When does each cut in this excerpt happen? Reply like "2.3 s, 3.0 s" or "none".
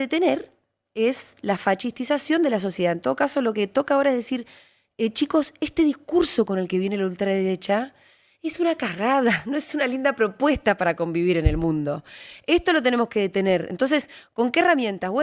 none